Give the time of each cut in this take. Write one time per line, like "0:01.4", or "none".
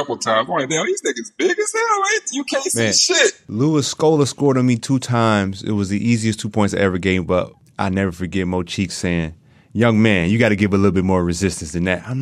0:03.4
0:07.6